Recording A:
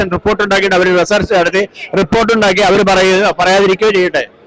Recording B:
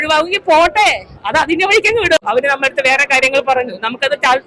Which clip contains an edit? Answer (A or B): B